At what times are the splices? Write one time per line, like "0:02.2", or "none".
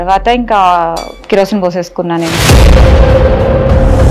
0:01.1